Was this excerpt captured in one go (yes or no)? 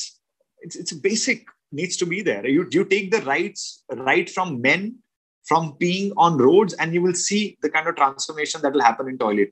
yes